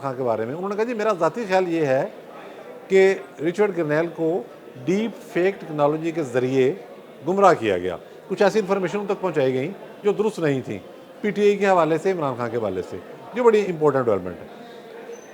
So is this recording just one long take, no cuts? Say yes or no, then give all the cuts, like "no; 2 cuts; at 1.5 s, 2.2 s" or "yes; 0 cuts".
yes; 0 cuts